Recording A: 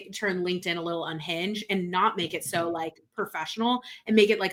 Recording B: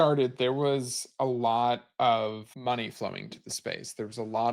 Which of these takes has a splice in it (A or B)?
B